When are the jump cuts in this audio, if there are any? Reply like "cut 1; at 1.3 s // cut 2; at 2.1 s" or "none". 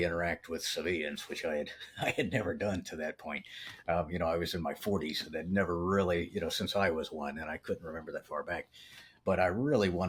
none